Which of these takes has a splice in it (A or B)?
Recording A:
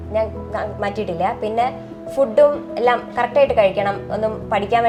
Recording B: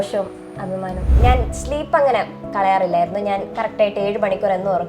B